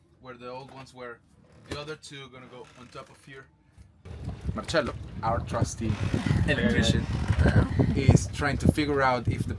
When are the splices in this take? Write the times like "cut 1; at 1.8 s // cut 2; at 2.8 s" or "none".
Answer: cut 1; at 4.2 s // cut 2; at 7.7 s